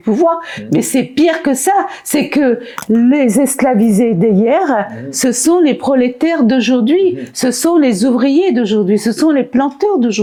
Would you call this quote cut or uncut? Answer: uncut